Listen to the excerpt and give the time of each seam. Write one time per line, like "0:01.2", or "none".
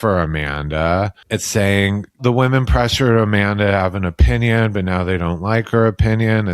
0:01.2
0:02.2

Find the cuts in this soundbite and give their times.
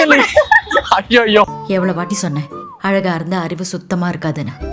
0:01.4

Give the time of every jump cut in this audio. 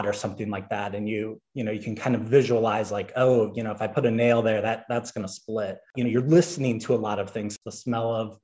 0:05.9
0:07.5

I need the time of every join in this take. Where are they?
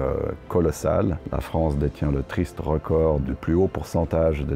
0:01.2
0:03.3

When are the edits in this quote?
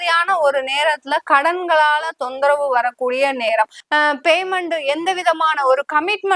0:03.8

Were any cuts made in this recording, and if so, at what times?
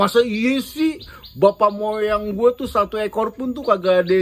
none

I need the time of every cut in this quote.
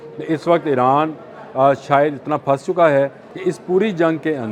0:03.2

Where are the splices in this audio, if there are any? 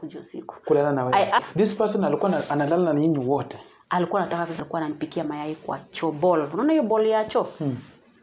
0:01.5
0:04.6

